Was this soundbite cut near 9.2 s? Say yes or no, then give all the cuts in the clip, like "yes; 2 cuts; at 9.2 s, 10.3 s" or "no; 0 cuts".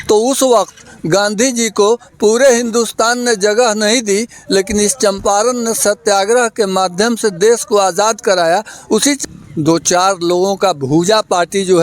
yes; 1 cut; at 9.2 s